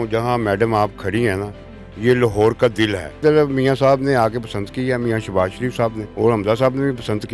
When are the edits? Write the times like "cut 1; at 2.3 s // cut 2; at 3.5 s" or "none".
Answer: cut 1; at 3.2 s // cut 2; at 6.0 s